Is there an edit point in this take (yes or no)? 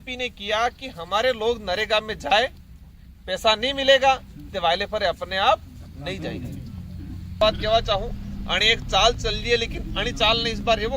yes